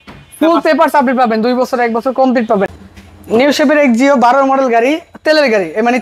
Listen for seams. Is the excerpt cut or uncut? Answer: cut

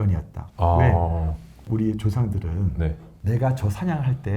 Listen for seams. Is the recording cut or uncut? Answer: cut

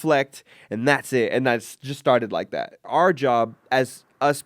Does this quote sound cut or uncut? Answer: cut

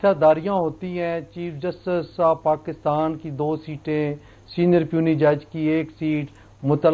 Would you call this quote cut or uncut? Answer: uncut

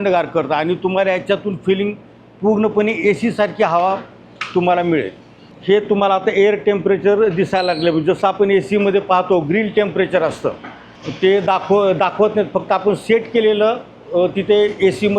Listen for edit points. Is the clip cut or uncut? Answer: uncut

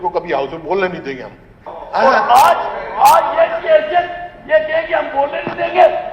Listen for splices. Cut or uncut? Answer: cut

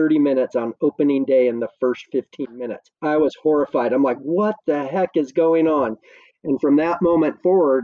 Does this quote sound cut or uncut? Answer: uncut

